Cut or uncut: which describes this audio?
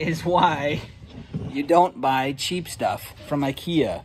uncut